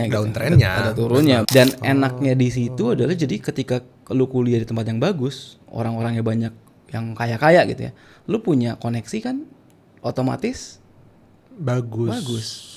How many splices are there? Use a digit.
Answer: 1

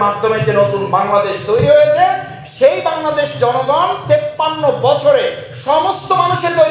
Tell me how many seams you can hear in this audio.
0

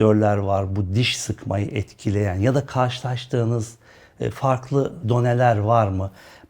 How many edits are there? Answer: 0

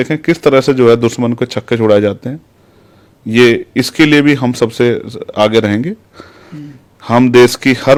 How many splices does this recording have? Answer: 0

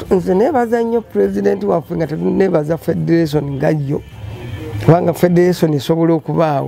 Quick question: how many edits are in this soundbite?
0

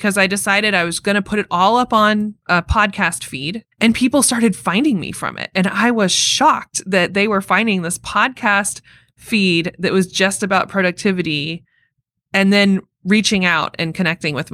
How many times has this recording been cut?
2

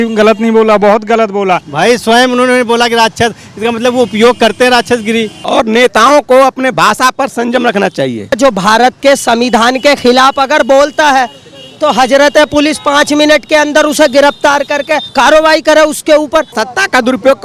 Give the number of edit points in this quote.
5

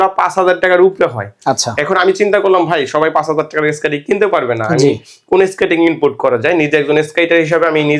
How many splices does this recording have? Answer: 0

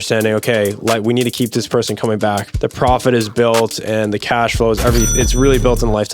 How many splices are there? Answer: 1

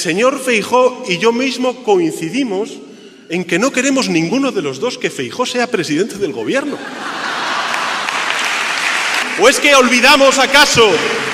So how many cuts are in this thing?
1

